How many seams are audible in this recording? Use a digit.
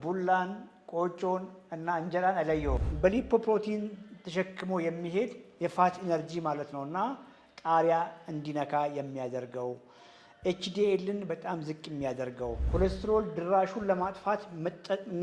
2